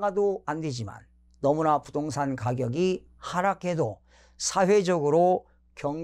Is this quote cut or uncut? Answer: uncut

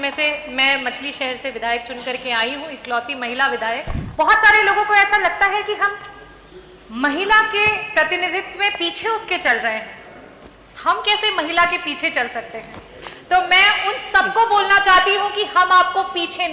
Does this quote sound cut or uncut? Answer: cut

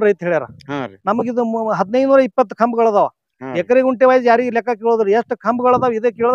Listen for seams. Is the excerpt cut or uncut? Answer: uncut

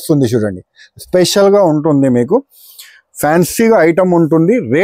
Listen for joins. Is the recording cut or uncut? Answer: uncut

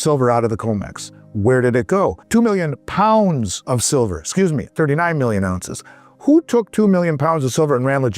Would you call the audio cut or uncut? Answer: cut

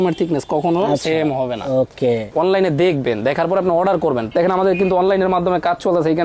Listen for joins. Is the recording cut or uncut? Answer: cut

